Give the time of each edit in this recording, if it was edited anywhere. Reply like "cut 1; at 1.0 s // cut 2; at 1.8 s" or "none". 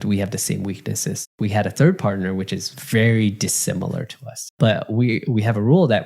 cut 1; at 1.3 s // cut 2; at 4.5 s